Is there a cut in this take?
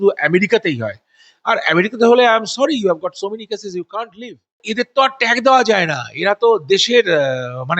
yes; 1 cut; at 4.6 s

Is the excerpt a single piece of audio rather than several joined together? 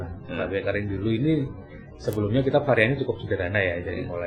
yes; 0 cuts

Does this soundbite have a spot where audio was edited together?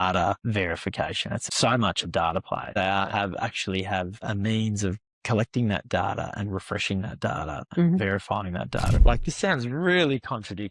yes; 3 cuts; at 1.3 s, 2.8 s, 8.9 s

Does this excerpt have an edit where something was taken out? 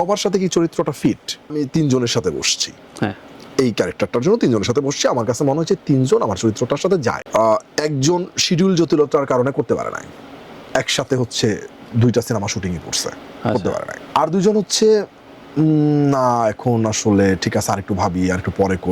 yes; 3 cuts; at 1.5 s, 7.2 s, 14.0 s

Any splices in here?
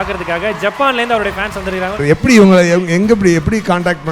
yes; 1 cut; at 2.0 s

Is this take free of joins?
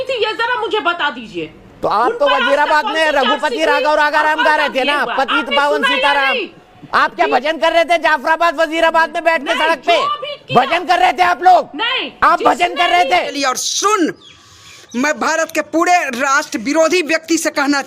no; 1 cut; at 13.3 s

